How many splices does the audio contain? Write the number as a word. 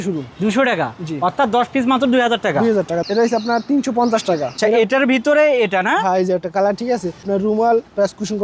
three